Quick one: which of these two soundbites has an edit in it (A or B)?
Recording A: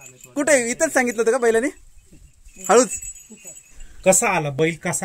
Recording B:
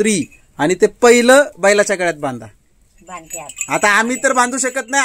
A